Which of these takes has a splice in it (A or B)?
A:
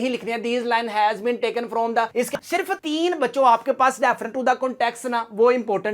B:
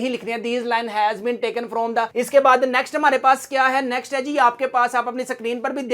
A